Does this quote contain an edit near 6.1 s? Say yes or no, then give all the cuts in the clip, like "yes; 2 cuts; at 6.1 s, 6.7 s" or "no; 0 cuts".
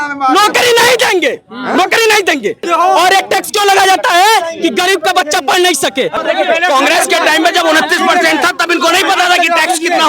yes; 2 cuts; at 2.6 s, 6.1 s